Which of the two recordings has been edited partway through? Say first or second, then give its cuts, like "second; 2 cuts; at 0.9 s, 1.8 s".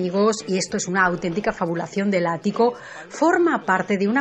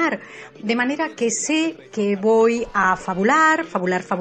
second; 1 cut; at 2.5 s